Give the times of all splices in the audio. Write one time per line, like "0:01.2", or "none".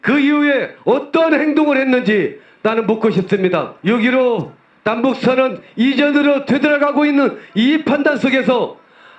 0:03.7